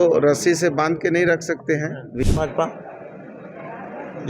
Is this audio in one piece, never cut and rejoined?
no; 1 cut; at 2.3 s

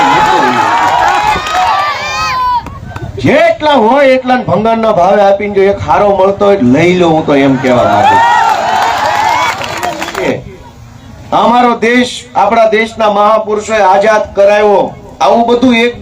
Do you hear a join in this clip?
yes; 2 cuts; at 1.7 s, 10.3 s

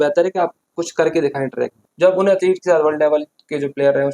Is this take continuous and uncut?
no; 1 cut; at 1.8 s

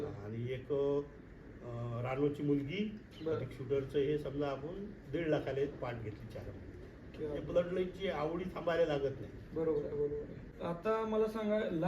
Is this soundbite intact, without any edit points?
no; 1 cut; at 10.5 s

